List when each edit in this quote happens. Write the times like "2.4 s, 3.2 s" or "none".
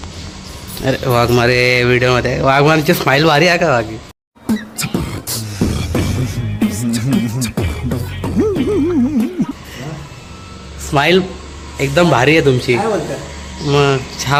none